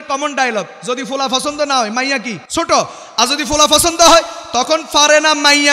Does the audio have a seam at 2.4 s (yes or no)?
yes